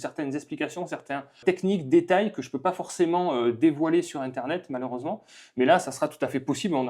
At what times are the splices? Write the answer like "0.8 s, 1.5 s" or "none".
1.4 s